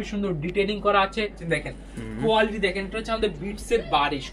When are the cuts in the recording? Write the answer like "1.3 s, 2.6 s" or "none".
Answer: 1.4 s

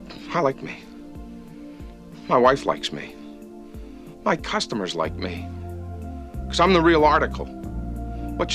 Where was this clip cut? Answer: none

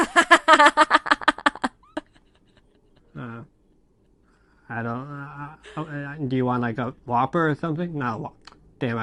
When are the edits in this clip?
none

